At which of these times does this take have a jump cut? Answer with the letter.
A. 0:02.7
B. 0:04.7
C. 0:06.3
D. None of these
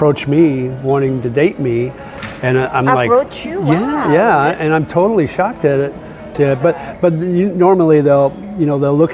C